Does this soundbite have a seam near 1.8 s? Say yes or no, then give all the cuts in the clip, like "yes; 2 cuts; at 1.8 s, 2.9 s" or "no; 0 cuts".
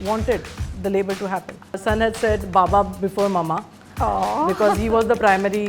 yes; 1 cut; at 1.8 s